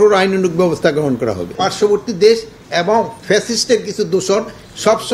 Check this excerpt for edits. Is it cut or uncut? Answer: cut